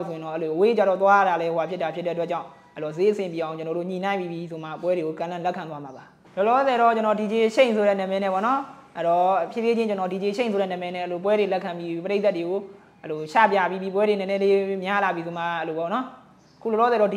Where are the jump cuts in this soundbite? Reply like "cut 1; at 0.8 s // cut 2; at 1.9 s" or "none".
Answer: cut 1; at 6.1 s